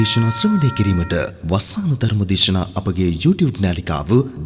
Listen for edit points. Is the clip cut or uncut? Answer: uncut